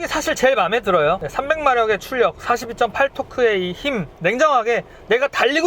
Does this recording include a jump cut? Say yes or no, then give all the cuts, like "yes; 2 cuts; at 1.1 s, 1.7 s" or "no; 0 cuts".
yes; 1 cut; at 1.3 s